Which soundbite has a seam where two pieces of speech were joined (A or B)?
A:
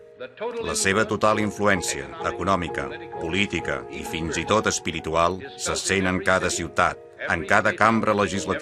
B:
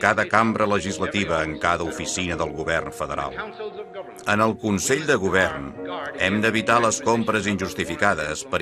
B